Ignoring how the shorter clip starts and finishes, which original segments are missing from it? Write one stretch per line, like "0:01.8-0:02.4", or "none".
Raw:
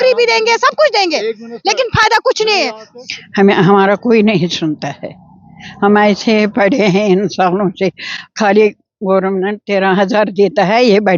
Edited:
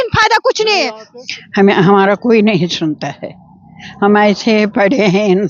none